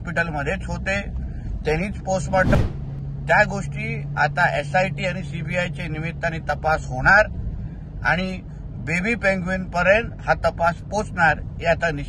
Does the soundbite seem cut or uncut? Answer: cut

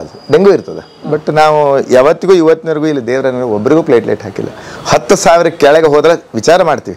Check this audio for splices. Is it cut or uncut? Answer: uncut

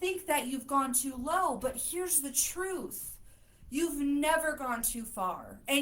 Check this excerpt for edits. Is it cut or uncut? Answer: uncut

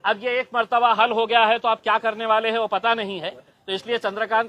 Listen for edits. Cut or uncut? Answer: uncut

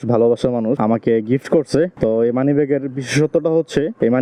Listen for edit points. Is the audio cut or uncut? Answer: uncut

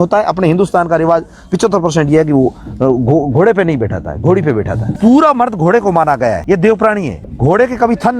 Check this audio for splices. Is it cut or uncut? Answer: cut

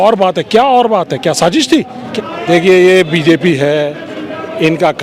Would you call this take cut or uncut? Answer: cut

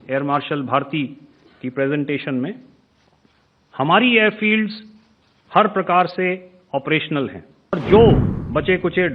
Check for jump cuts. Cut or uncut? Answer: cut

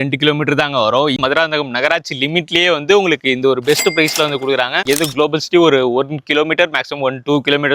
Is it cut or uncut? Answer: cut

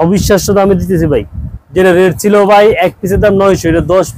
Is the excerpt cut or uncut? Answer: uncut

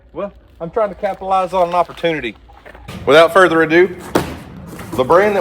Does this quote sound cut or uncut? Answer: cut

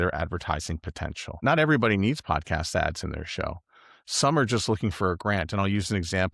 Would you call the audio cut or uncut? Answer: cut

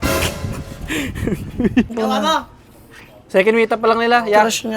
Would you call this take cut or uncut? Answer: cut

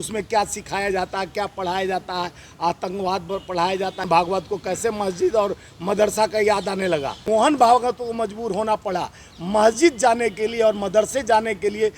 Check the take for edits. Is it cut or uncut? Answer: cut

